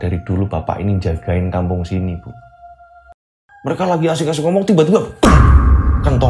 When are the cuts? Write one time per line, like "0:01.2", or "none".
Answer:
0:03.0